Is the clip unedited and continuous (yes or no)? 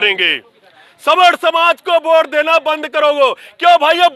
yes